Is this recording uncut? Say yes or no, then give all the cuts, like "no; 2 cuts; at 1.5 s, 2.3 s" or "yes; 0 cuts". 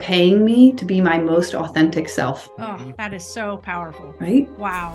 no; 2 cuts; at 2.5 s, 4.0 s